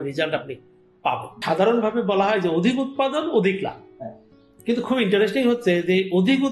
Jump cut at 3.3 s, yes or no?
no